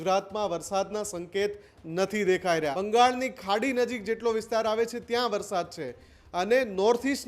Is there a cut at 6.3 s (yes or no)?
no